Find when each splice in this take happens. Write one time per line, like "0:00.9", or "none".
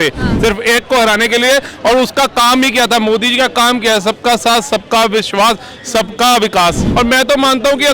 0:06.8